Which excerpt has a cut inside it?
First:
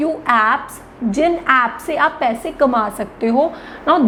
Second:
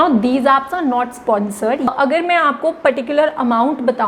second; 1 cut; at 1.9 s

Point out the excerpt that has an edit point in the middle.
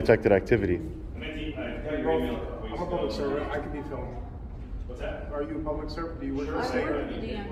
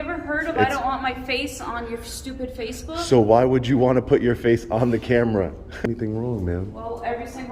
second; 1 cut; at 5.8 s

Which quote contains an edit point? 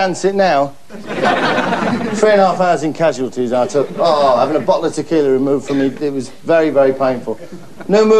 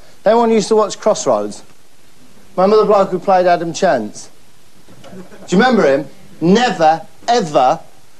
first; 1 cut; at 6.9 s

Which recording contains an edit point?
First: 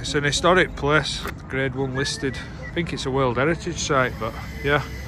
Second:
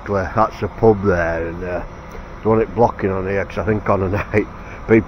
first; 2 cuts; at 1.2 s, 2.5 s

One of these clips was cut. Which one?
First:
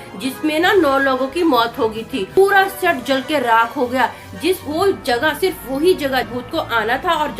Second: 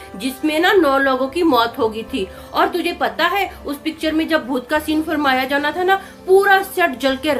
first; 2 cuts; at 2.3 s, 6.3 s

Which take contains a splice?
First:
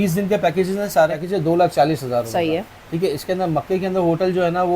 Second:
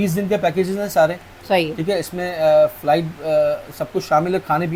first; 1 cut; at 1.2 s

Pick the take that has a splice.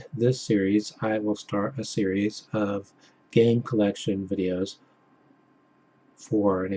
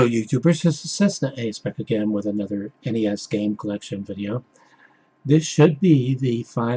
first; 1 cut; at 2.1 s

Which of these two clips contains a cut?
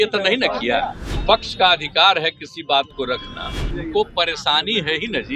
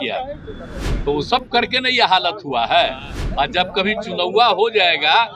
first; 2 cuts; at 1.1 s, 3.7 s

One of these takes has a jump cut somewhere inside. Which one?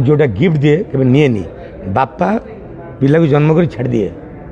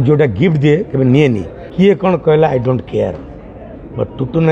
second; 1 cut; at 1.6 s

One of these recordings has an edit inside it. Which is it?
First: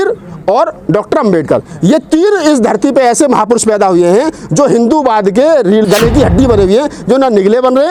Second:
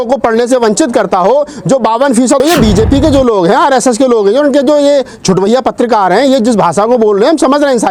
second; 1 cut; at 2.4 s

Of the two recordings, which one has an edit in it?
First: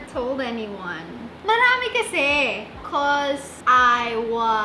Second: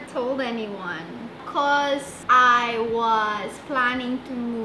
second; 1 cut; at 1.3 s

